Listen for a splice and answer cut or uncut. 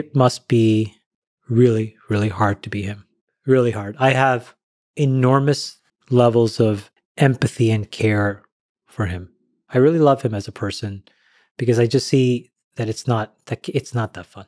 uncut